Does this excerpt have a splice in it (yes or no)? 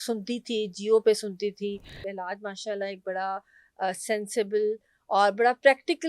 yes